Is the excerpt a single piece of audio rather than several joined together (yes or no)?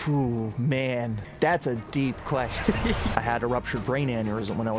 no